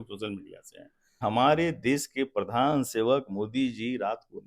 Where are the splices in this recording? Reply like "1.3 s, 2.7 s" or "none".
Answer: 1.2 s